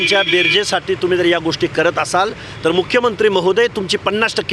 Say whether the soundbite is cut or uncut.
uncut